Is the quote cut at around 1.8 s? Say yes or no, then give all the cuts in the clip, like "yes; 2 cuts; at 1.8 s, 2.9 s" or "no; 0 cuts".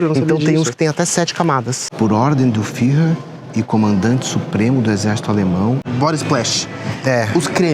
yes; 2 cuts; at 1.8 s, 5.9 s